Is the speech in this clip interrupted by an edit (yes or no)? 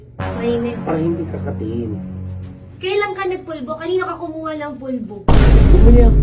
no